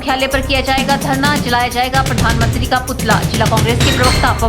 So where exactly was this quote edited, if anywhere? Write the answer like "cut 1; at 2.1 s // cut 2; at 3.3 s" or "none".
none